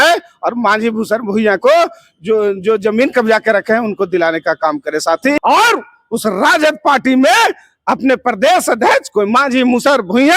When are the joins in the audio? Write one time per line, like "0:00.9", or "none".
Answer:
0:05.4

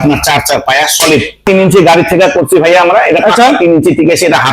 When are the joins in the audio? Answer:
0:01.4

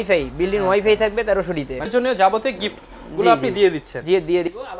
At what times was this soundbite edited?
0:01.9

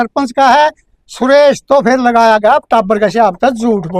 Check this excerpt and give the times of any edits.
none

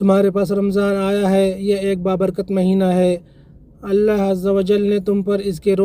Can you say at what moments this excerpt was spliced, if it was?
none

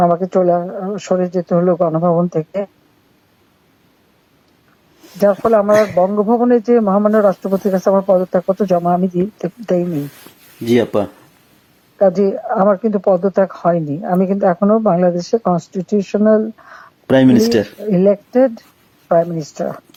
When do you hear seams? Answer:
none

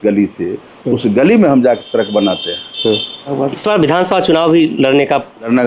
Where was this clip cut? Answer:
none

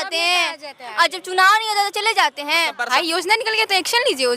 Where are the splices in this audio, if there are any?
0:02.9

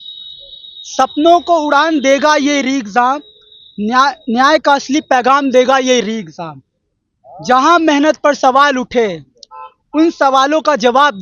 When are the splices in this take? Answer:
none

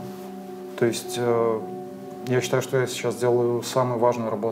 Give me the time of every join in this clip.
none

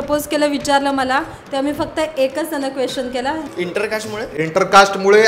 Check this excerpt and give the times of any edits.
0:03.4

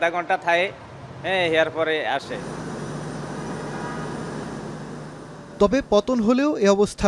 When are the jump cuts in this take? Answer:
none

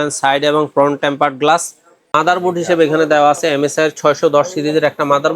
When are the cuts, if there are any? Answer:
0:01.9

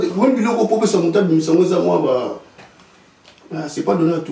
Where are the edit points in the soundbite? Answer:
none

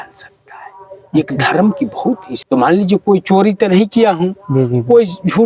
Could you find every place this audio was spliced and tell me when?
0:02.3

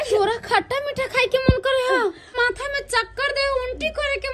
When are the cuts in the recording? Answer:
0:02.3

